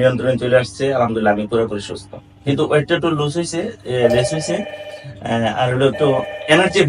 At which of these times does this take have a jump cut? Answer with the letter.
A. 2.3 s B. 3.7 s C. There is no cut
C